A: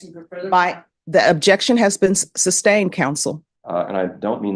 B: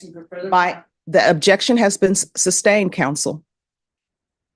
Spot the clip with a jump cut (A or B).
A